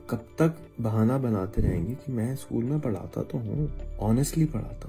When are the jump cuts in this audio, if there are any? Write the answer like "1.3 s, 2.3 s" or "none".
3.8 s